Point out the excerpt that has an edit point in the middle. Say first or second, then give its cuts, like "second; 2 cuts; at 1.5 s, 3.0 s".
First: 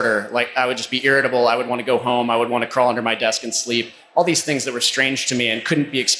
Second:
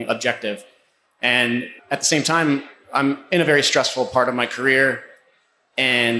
second; 1 cut; at 1.8 s